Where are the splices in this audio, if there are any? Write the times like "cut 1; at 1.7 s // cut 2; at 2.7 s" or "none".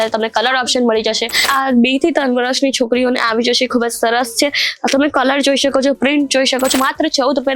cut 1; at 1.5 s // cut 2; at 6.7 s